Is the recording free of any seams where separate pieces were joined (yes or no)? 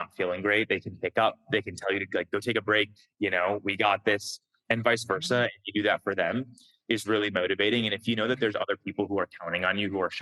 yes